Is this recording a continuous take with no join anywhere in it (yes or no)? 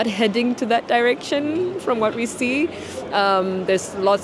yes